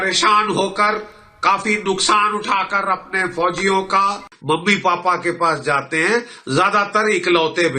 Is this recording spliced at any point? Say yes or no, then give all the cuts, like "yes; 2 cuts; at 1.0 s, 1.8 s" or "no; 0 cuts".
yes; 1 cut; at 4.3 s